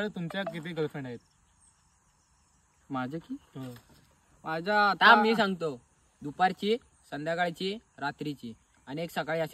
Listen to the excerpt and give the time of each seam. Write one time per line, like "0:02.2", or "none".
none